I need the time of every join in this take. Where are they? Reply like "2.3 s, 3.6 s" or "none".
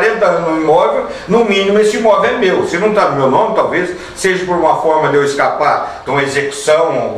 none